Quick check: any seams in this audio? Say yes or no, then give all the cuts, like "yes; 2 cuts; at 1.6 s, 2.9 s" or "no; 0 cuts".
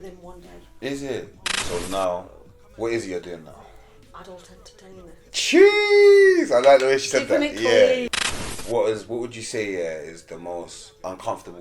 yes; 2 cuts; at 1.6 s, 8.0 s